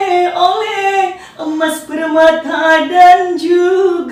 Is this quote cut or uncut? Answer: uncut